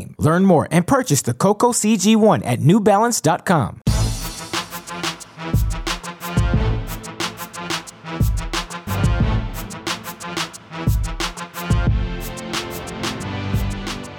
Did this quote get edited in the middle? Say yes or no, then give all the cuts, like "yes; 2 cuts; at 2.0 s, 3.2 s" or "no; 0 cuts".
yes; 3 cuts; at 3.8 s, 11.0 s, 13.2 s